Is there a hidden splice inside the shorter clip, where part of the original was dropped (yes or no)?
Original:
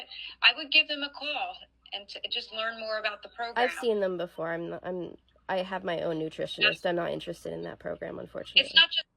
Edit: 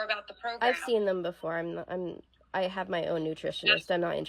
no